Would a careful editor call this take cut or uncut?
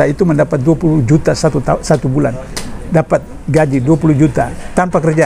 uncut